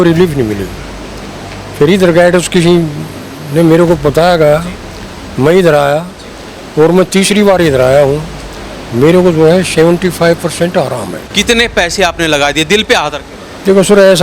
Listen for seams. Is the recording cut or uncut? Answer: cut